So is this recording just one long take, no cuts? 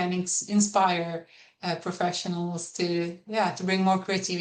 yes; 0 cuts

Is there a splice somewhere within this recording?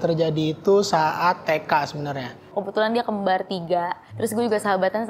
yes; 2 cuts; at 2.5 s, 4.0 s

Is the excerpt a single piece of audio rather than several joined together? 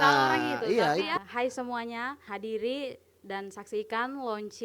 no; 2 cuts; at 1.1 s, 2.2 s

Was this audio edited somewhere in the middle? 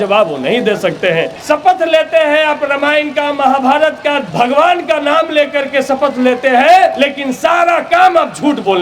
yes; 3 cuts; at 1.3 s, 4.3 s, 6.9 s

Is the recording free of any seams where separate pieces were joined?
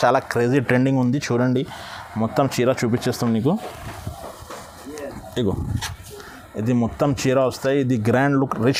yes; 0 cuts

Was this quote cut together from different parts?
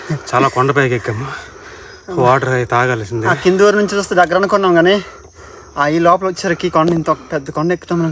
no; 0 cuts

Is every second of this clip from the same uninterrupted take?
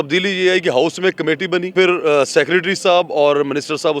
no; 1 cut; at 1.7 s

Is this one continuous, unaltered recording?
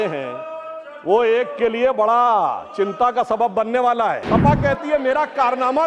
no; 1 cut; at 4.2 s

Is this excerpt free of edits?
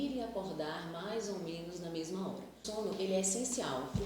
no; 1 cut; at 2.5 s

